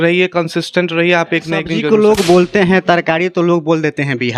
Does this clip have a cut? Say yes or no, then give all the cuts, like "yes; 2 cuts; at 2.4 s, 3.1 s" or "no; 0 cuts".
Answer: yes; 1 cut; at 1.7 s